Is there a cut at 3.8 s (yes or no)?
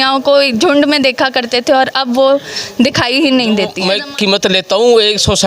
yes